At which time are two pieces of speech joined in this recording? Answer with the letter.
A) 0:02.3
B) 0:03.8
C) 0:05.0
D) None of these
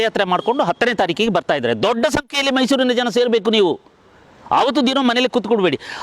D